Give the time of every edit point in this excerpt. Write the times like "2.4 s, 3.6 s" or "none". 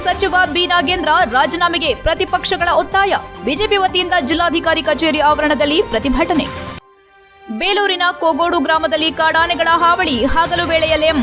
none